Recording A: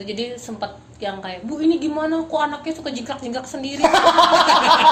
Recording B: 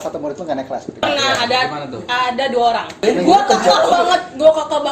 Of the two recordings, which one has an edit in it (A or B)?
B